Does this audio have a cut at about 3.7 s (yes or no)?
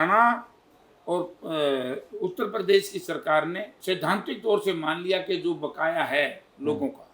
yes